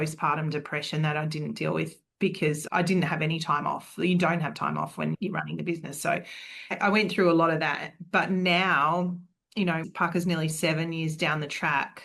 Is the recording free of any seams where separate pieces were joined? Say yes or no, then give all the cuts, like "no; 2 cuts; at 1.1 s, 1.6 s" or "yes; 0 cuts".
yes; 0 cuts